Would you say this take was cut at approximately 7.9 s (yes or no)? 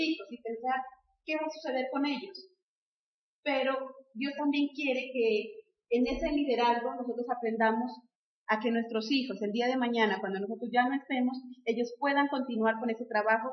no